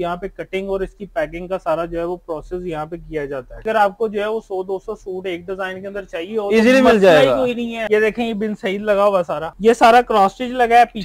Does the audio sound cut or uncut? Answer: cut